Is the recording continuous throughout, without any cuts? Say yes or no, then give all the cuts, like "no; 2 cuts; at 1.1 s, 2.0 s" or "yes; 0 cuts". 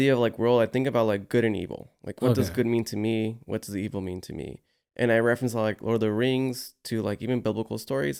yes; 0 cuts